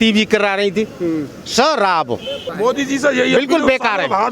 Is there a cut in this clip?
yes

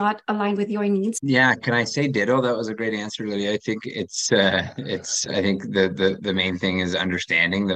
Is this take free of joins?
no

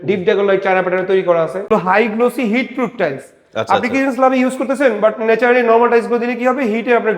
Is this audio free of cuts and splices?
no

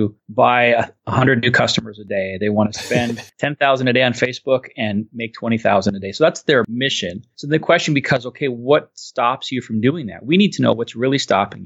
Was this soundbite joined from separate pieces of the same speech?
yes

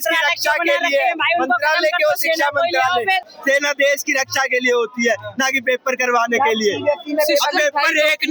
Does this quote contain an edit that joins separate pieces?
yes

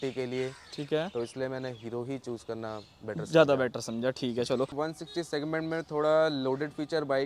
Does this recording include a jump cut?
yes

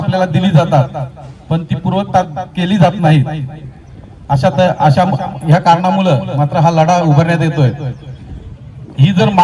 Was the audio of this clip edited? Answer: no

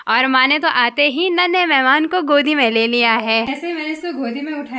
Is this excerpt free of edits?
no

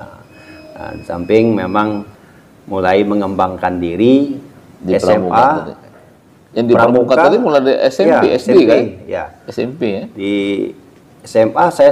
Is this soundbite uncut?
yes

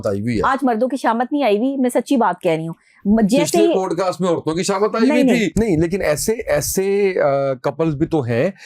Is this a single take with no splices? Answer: no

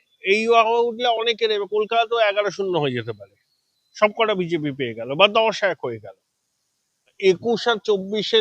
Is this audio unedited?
no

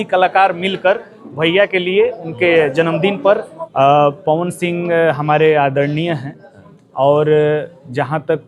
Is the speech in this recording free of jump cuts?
no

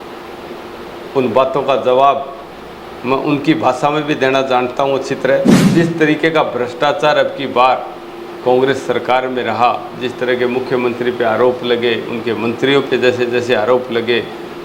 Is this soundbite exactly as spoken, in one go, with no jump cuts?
no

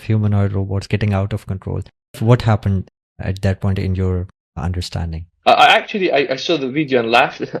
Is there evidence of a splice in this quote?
yes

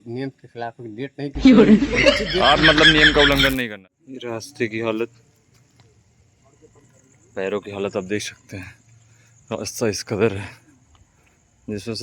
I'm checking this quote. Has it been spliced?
yes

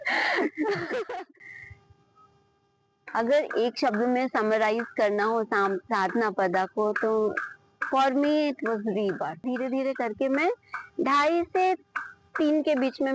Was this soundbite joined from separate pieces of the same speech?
yes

